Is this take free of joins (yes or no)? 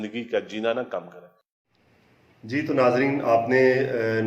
yes